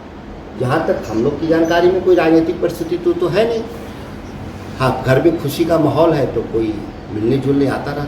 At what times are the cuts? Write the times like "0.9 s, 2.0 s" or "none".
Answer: none